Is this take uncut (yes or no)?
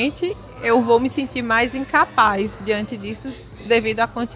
yes